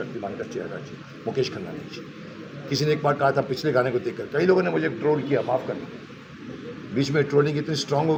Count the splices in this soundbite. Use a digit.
0